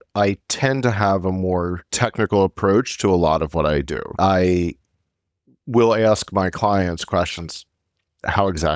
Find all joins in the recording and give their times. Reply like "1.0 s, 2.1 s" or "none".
none